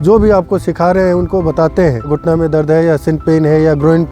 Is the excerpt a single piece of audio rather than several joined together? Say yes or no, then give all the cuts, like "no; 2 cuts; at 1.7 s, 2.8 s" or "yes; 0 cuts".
no; 1 cut; at 2.1 s